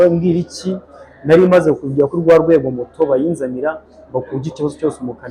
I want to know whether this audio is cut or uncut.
uncut